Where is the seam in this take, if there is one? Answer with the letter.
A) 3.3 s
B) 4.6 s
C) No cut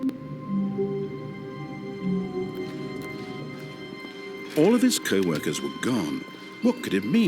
B